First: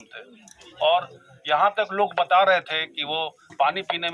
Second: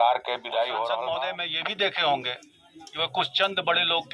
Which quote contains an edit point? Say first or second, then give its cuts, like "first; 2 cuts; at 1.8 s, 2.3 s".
second; 1 cut; at 1.2 s